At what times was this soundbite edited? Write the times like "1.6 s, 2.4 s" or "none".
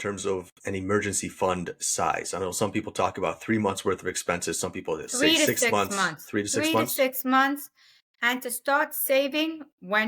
none